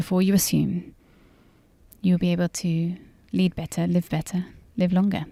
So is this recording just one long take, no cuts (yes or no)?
yes